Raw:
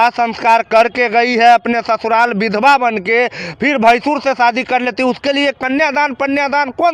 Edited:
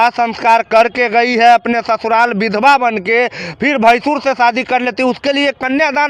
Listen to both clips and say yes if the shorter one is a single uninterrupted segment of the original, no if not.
yes